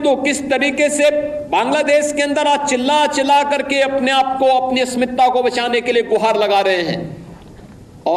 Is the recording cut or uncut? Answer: uncut